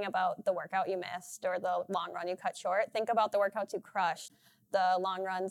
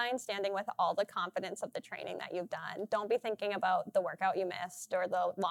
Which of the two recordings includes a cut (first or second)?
first